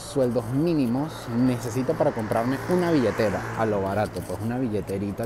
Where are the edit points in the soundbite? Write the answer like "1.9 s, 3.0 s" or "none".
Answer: none

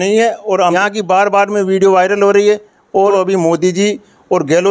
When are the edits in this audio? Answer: 0.7 s, 3.1 s

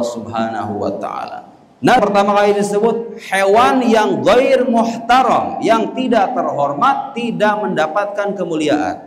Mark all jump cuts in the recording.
2.0 s

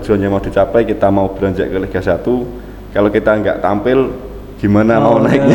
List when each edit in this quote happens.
none

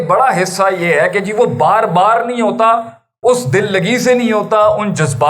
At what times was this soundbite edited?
none

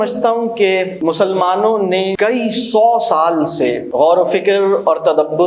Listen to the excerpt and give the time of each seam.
0.9 s, 2.1 s, 3.8 s

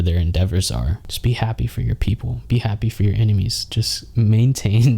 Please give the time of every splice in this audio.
1.0 s

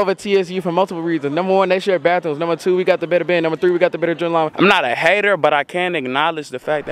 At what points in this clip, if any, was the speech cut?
4.5 s

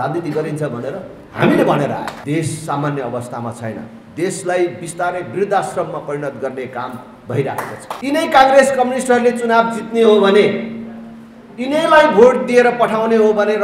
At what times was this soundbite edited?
2.2 s, 7.9 s

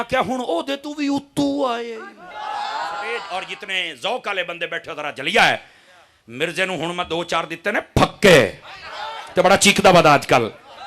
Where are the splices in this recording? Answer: 3.2 s

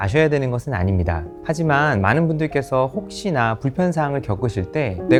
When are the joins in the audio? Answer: none

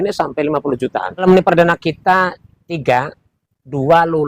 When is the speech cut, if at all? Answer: 1.2 s

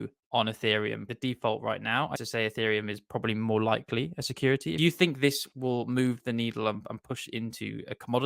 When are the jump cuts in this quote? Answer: 1.1 s, 2.2 s, 4.8 s

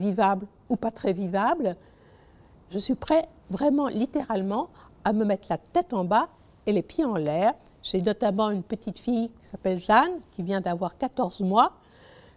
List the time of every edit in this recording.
none

